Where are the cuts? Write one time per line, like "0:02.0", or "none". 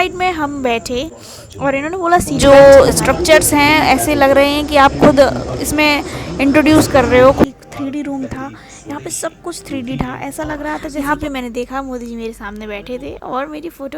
0:02.4
0:07.4
0:11.0